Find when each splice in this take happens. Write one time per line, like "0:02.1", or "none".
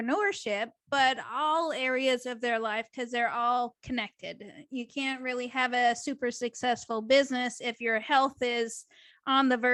none